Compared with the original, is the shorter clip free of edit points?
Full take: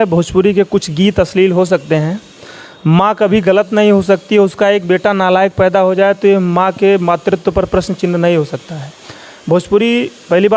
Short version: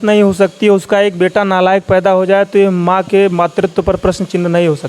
yes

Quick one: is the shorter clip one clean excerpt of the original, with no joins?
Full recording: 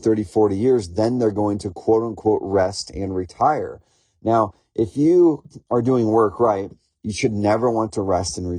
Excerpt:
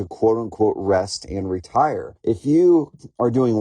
no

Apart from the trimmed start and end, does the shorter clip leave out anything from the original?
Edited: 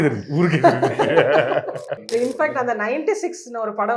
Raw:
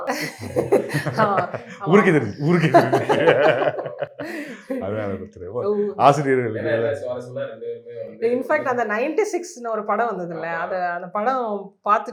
yes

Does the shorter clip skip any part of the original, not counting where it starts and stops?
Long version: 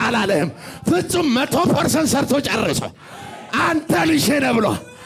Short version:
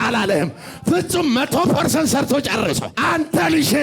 yes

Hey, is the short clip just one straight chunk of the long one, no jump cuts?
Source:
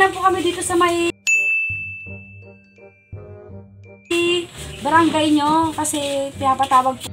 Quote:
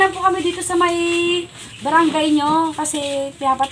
no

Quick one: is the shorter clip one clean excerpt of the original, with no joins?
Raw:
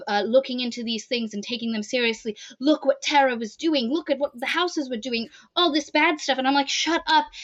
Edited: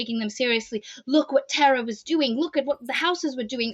yes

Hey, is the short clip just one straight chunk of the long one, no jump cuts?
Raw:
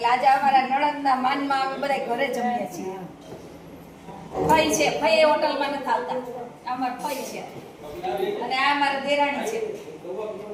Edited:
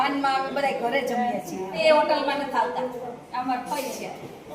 no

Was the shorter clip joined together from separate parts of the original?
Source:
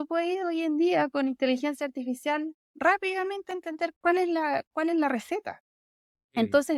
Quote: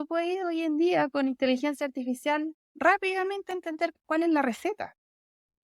yes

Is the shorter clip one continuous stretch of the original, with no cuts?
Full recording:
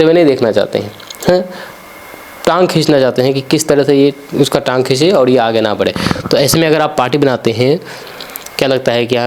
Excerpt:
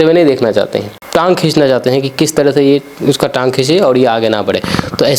no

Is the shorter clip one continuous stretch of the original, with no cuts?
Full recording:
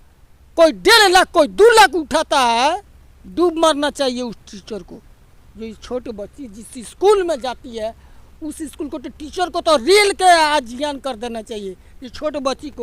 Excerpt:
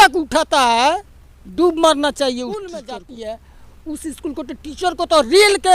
no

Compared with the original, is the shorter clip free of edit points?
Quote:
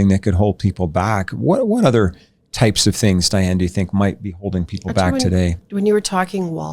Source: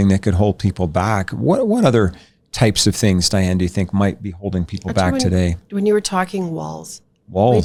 yes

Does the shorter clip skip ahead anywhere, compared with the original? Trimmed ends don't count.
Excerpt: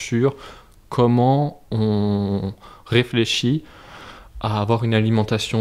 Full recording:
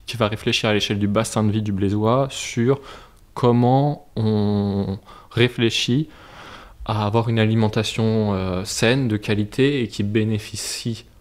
no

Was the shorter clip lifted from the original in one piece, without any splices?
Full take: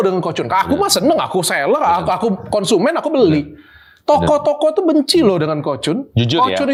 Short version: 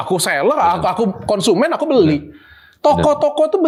yes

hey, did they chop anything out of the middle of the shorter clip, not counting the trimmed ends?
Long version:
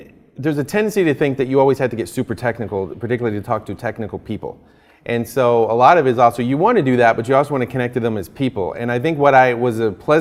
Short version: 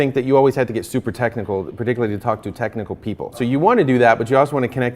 yes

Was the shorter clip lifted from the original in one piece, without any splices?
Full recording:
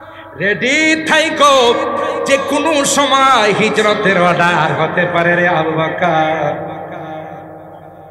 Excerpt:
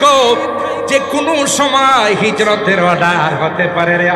yes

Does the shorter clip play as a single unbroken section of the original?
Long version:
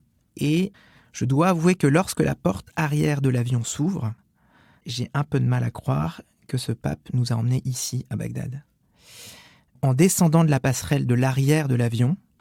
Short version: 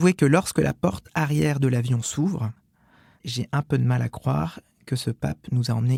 yes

